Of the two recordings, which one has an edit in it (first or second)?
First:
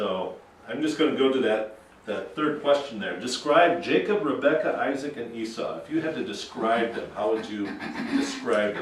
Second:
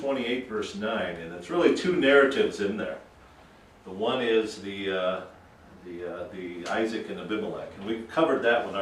first